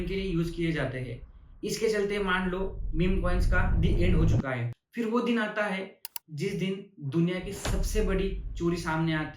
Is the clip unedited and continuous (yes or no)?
no